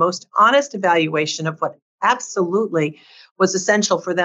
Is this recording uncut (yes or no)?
yes